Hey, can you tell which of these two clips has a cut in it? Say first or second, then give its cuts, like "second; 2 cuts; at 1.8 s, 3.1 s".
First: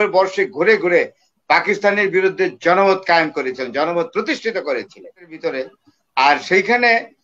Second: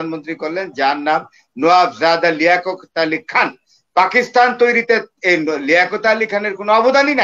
first; 1 cut; at 5.4 s